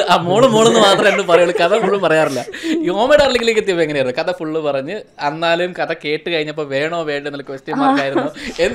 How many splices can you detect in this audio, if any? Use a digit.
0